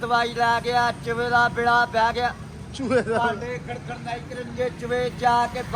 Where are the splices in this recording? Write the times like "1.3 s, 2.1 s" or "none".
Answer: none